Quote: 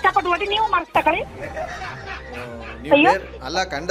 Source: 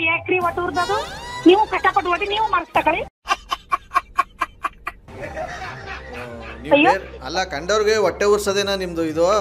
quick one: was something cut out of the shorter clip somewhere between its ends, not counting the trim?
yes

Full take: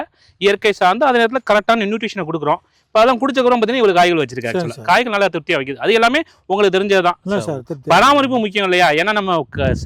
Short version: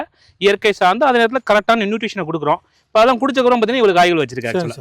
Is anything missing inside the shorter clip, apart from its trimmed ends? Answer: no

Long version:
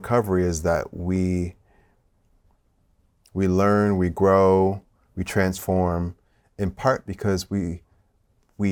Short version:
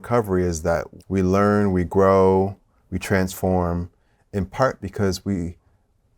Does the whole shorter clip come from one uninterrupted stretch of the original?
no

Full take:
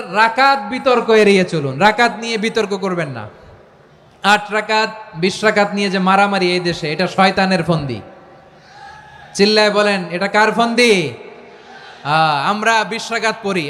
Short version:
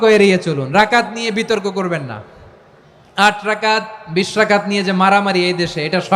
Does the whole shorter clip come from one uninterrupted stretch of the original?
yes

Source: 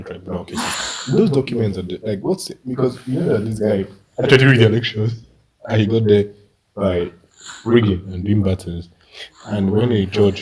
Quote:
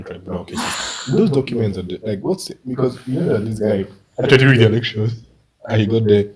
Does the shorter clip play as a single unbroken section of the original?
yes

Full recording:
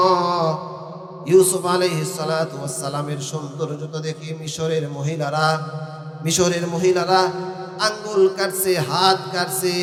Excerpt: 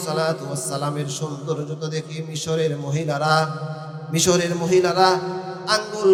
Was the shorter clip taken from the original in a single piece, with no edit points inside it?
yes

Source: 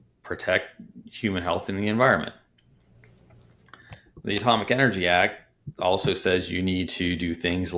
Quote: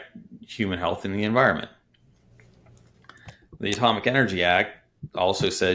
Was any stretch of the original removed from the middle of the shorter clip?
no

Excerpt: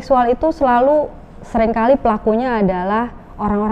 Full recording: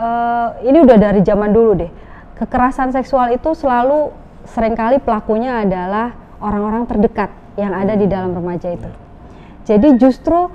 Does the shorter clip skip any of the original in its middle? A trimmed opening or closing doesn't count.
no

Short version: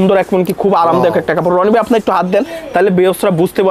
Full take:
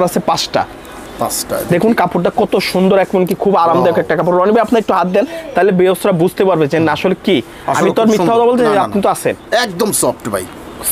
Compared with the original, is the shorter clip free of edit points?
yes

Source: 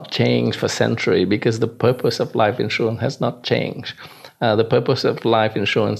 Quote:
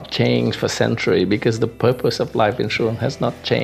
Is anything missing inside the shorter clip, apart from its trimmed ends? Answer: no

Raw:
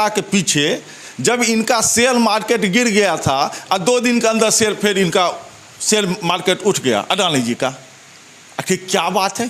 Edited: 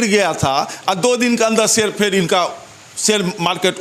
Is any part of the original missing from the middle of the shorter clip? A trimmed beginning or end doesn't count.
no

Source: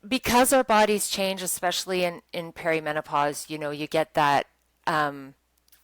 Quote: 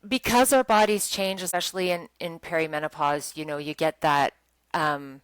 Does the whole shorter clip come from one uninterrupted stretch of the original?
no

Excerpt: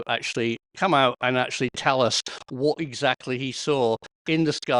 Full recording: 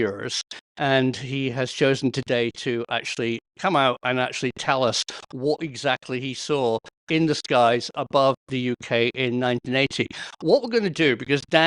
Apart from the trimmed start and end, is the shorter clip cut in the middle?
no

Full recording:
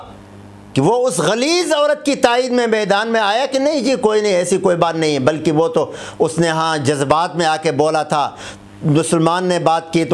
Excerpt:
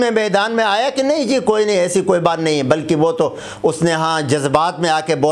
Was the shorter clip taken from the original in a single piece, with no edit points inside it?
yes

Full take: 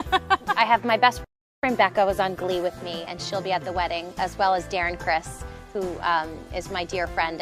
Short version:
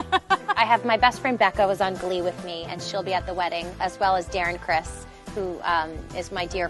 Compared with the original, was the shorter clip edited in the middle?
yes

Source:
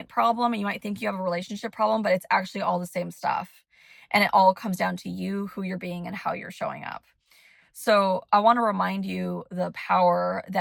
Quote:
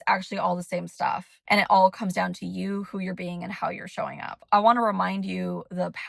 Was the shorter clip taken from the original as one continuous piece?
no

